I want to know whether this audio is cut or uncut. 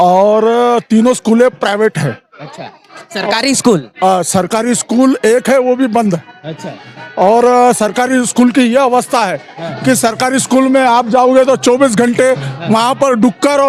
uncut